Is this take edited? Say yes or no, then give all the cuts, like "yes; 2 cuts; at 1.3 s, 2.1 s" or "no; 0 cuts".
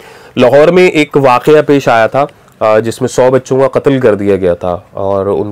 no; 0 cuts